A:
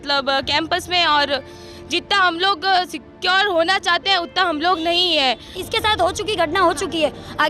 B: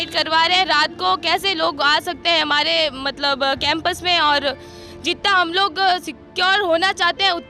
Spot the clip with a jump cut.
A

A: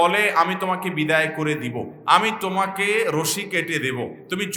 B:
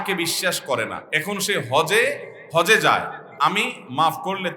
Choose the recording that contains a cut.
B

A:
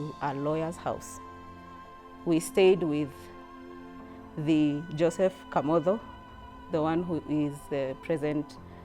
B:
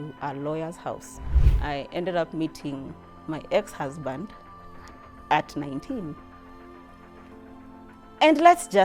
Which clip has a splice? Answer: B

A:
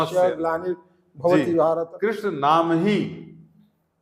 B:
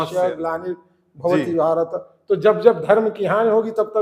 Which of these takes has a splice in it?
A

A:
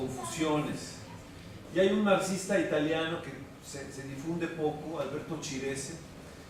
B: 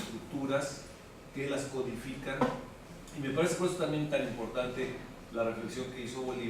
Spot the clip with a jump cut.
B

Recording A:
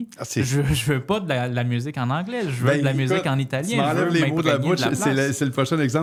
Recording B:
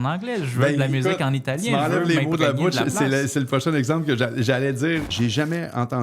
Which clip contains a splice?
B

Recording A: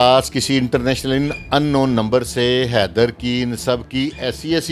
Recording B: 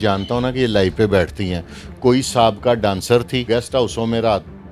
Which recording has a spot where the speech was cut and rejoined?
B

